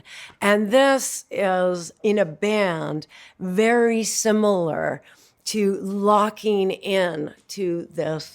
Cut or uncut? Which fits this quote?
cut